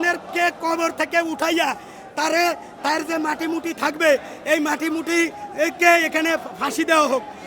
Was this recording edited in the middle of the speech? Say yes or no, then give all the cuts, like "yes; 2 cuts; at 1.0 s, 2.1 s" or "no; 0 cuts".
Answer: no; 0 cuts